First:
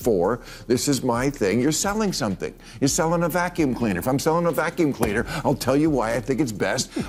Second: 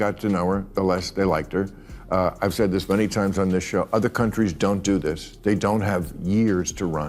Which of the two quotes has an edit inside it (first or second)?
second